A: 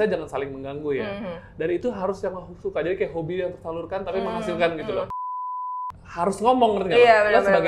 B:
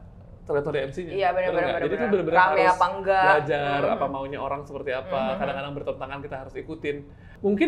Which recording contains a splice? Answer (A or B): A